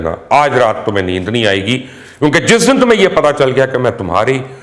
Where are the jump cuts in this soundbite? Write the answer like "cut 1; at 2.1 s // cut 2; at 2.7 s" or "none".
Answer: none